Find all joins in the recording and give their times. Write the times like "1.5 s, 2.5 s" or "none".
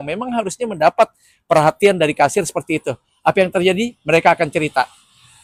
none